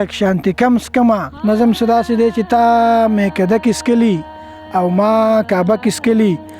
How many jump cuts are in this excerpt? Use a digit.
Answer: 1